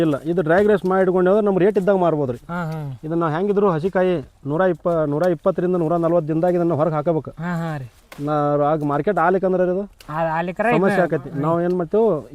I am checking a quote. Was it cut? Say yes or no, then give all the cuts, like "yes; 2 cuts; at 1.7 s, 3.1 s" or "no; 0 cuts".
no; 0 cuts